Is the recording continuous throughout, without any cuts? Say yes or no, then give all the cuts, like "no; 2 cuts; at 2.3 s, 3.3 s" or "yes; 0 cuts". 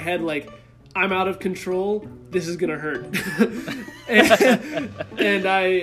yes; 0 cuts